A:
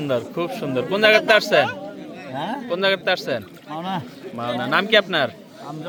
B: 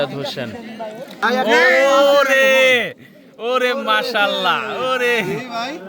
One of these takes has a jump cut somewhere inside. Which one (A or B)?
B